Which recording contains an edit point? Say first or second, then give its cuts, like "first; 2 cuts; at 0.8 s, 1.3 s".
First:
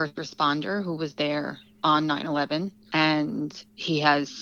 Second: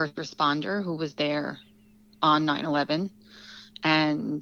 first; 2 cuts; at 1.6 s, 2.8 s